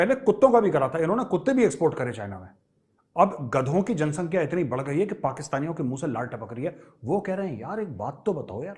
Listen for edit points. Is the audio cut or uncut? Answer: uncut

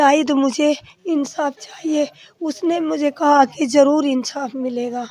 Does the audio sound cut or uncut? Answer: uncut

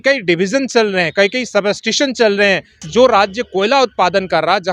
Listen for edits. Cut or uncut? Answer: cut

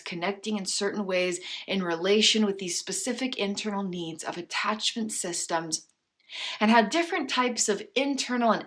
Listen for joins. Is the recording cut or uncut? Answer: uncut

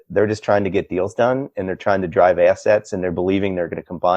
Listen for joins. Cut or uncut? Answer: uncut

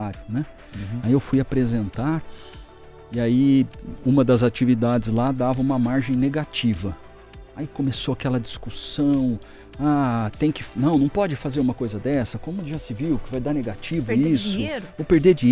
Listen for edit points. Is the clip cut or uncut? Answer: uncut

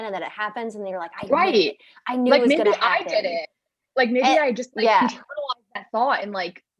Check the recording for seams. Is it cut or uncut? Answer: uncut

